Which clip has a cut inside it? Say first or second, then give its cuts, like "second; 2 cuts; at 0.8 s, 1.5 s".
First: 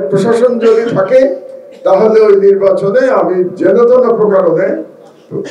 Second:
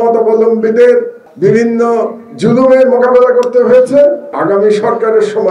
second; 2 cuts; at 1.2 s, 4.4 s